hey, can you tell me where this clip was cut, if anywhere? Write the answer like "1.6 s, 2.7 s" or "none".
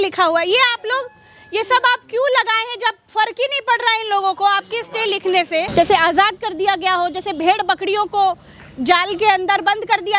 5.7 s